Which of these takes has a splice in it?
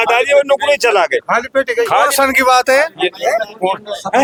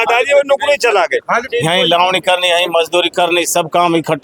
second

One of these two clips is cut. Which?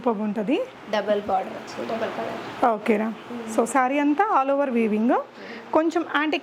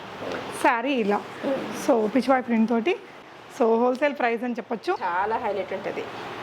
second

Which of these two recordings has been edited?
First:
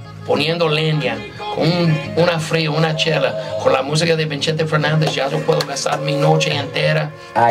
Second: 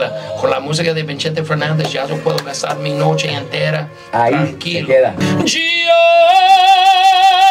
second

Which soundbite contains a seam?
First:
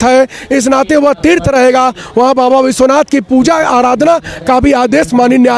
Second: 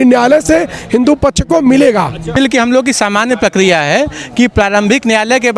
second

